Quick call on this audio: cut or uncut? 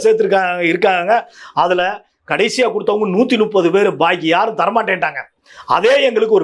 uncut